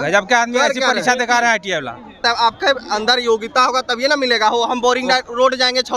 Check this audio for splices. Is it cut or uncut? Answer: cut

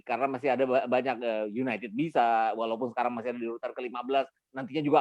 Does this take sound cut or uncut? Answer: uncut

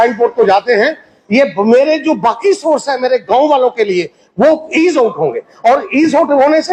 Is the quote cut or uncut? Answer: uncut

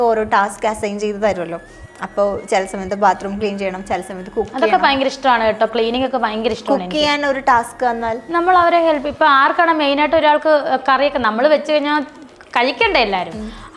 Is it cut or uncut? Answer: uncut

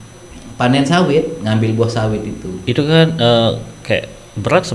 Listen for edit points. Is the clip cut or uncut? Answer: uncut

